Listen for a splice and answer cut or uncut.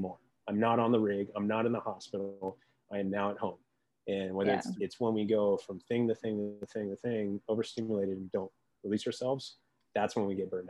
cut